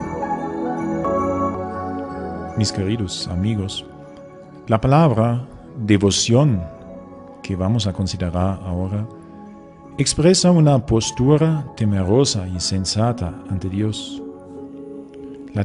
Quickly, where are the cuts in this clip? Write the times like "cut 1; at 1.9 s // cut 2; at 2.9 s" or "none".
none